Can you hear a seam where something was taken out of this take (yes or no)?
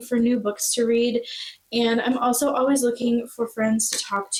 no